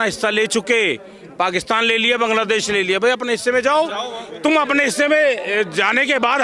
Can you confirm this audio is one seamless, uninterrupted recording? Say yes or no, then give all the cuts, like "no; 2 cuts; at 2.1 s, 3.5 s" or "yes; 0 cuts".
yes; 0 cuts